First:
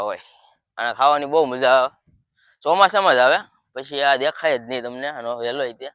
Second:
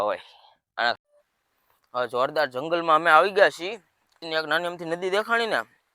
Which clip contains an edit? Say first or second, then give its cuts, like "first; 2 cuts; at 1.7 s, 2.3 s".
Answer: second; 2 cuts; at 1.0 s, 4.2 s